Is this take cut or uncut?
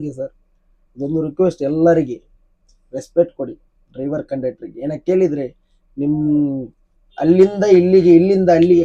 uncut